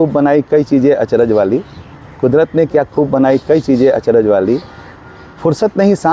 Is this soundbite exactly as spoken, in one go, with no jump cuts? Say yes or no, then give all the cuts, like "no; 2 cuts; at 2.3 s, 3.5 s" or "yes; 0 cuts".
yes; 0 cuts